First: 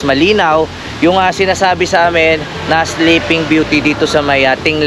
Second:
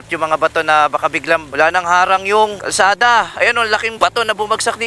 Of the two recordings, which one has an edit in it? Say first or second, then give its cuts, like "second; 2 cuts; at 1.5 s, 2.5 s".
second; 3 cuts; at 1.5 s, 2.6 s, 3.9 s